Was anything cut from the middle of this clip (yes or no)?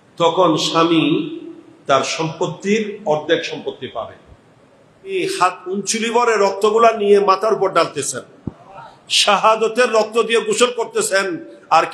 yes